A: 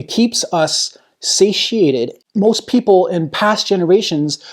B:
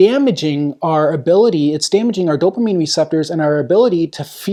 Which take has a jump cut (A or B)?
A